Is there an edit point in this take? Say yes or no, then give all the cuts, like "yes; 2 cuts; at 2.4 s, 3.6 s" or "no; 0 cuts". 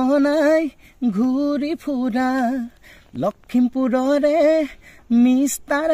no; 0 cuts